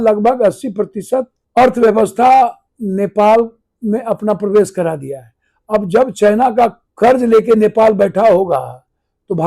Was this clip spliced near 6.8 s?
yes; 2 cuts; at 1.4 s, 6.8 s

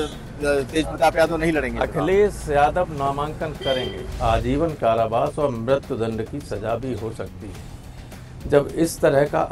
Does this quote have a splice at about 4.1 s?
yes; 1 cut; at 4.1 s

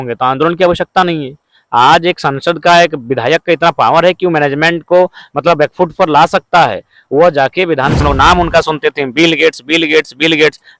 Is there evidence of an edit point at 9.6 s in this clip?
no; 1 cut; at 8.0 s

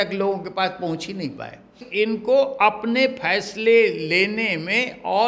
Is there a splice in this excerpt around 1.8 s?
yes; 1 cut; at 1.8 s

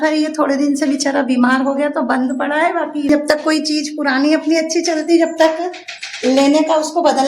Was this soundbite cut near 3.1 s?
yes; 1 cut; at 3.1 s

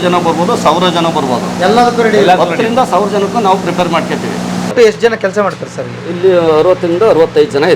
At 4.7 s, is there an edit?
yes; 1 cut; at 4.7 s

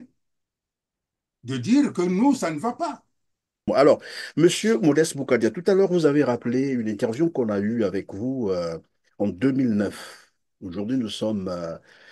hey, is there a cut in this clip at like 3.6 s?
yes; 1 cut; at 3.6 s

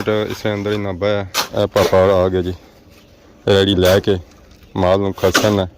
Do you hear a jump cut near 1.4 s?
yes; 1 cut; at 1.4 s

